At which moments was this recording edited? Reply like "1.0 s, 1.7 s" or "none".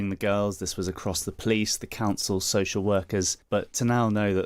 3.4 s